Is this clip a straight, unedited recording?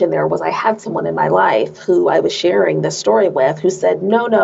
yes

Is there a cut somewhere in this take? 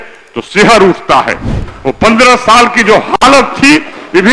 no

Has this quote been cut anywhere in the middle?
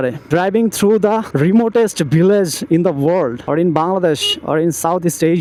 no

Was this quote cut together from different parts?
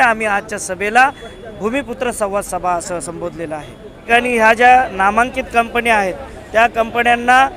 yes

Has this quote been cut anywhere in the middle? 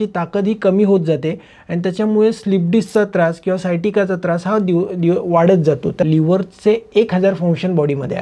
yes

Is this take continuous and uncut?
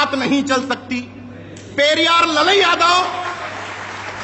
yes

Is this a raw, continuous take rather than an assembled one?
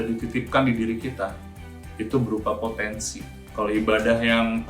yes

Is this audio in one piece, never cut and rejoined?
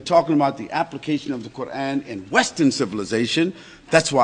no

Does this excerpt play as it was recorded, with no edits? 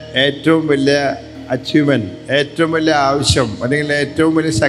yes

